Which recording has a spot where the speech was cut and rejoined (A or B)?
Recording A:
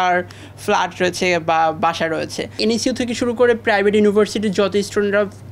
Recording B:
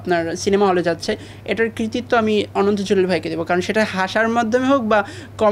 A